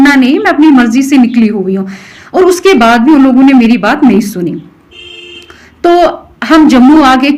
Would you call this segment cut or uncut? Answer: uncut